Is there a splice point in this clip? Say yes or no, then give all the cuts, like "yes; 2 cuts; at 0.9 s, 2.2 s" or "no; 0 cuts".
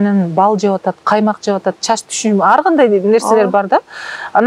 no; 0 cuts